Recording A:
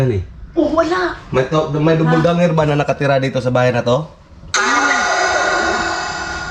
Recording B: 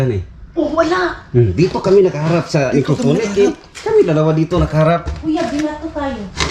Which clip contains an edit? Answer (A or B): A